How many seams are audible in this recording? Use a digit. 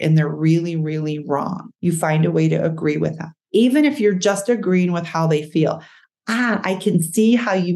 2